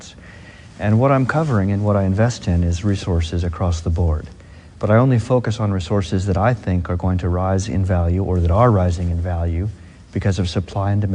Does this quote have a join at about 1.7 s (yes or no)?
no